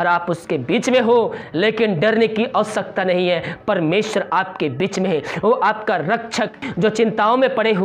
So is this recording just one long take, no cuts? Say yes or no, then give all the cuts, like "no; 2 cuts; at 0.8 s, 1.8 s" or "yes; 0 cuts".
no; 1 cut; at 6.5 s